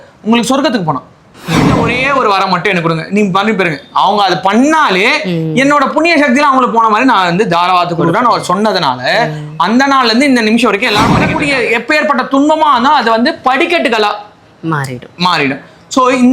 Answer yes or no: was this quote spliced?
yes